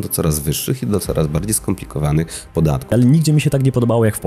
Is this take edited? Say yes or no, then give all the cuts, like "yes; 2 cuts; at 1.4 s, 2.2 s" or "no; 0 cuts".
yes; 1 cut; at 2.9 s